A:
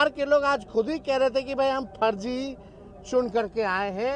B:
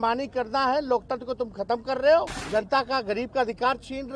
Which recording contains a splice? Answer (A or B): B